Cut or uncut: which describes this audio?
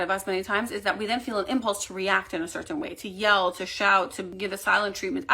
cut